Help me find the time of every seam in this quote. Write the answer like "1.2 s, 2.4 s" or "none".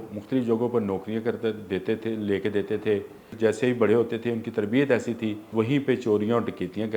3.3 s, 5.5 s